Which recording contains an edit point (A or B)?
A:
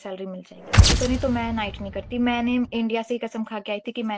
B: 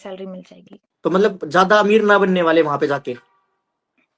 A